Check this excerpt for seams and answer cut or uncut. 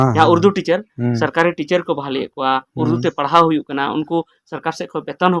uncut